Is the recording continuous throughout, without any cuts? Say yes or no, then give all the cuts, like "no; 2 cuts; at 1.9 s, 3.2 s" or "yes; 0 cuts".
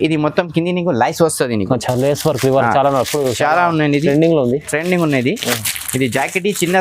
yes; 0 cuts